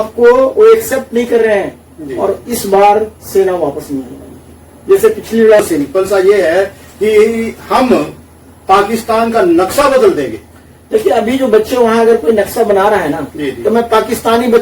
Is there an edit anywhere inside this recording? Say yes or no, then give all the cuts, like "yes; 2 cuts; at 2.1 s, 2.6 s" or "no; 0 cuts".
yes; 1 cut; at 5.6 s